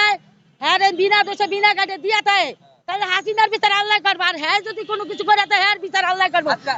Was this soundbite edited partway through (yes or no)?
no